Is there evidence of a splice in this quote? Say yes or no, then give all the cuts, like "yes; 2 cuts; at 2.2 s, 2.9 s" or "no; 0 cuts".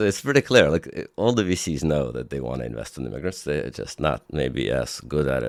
no; 0 cuts